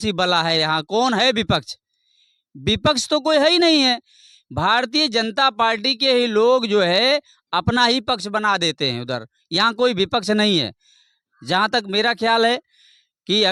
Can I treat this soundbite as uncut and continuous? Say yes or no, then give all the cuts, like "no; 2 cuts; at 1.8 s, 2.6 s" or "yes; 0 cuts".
yes; 0 cuts